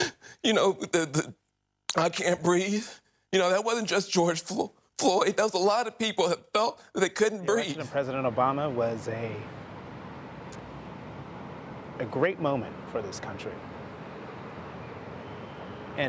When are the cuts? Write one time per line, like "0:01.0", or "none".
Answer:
0:07.8

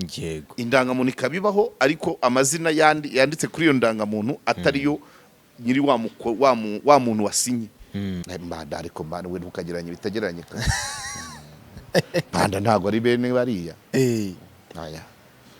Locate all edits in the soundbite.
0:08.2

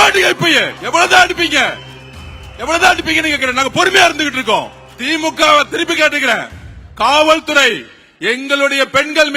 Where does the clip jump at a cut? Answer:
none

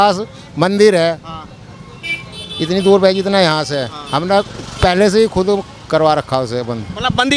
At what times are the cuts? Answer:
none

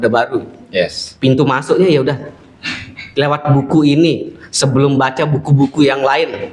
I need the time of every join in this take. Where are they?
none

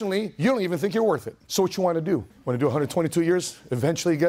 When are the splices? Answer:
0:01.4
0:02.3

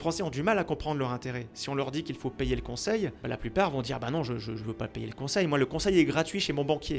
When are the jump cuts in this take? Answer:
0:03.2

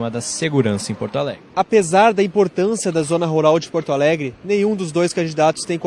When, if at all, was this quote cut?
0:01.2

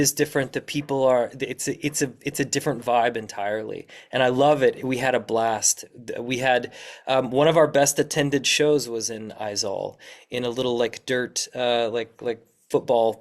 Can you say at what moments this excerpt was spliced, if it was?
none

